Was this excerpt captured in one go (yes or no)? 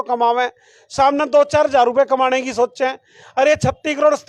yes